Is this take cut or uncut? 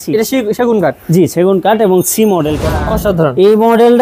cut